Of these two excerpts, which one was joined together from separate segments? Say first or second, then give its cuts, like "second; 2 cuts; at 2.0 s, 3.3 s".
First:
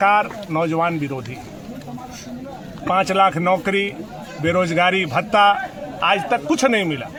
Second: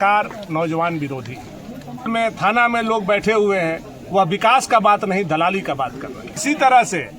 second; 2 cuts; at 2.1 s, 6.4 s